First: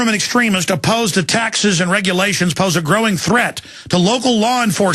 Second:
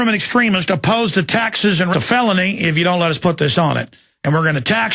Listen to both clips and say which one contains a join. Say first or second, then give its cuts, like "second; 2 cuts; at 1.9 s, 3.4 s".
first; 1 cut; at 1.9 s